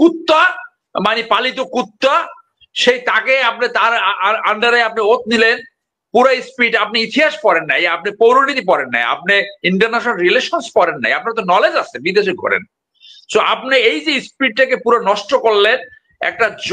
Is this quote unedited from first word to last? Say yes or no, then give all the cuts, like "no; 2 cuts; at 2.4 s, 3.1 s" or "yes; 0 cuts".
yes; 0 cuts